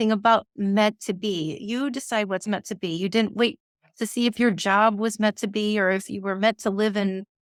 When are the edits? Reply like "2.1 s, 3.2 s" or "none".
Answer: none